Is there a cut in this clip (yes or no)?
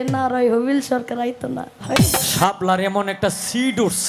yes